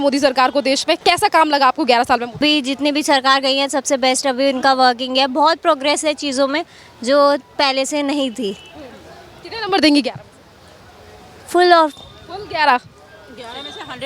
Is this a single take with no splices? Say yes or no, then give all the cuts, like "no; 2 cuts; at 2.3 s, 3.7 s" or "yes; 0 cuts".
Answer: no; 2 cuts; at 1.0 s, 2.4 s